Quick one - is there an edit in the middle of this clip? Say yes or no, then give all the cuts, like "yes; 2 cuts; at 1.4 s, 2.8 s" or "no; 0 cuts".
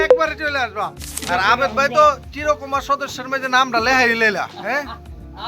yes; 1 cut; at 1.2 s